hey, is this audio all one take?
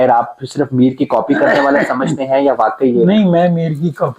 yes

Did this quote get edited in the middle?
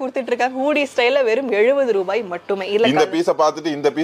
no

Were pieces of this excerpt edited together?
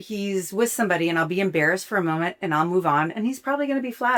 no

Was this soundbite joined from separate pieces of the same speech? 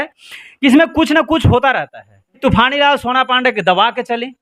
yes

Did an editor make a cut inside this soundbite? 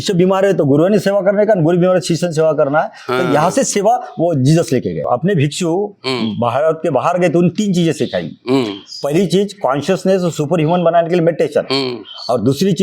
yes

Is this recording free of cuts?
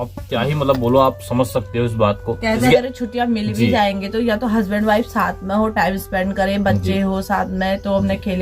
no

